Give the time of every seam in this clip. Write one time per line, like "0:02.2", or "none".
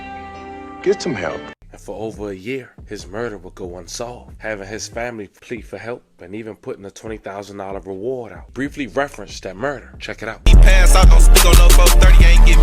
0:01.7
0:08.5